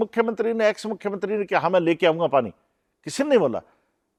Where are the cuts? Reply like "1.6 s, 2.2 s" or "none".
none